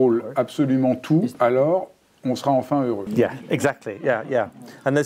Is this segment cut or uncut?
cut